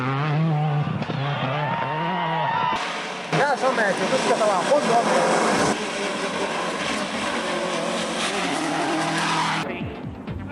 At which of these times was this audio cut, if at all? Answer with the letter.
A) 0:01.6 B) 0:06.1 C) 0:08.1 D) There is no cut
A